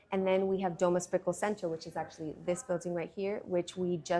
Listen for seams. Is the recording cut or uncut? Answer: uncut